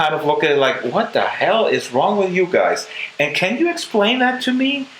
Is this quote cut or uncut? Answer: uncut